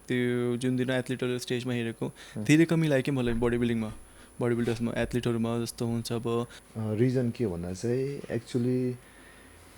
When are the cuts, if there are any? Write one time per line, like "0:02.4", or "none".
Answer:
0:06.5